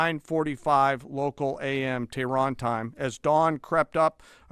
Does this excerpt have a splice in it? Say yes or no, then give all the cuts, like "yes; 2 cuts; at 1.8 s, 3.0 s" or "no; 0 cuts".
no; 0 cuts